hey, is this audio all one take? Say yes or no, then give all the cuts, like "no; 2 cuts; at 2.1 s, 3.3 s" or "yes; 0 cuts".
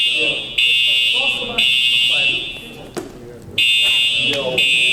yes; 0 cuts